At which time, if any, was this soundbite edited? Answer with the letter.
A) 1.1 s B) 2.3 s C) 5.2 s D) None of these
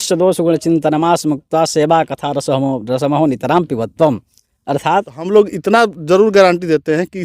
C